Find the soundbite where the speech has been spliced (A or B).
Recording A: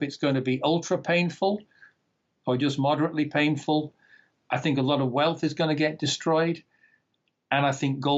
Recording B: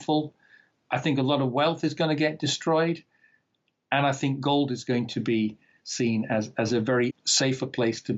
B